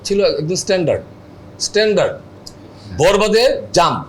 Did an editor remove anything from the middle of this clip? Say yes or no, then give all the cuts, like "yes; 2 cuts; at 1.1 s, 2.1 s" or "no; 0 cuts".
no; 0 cuts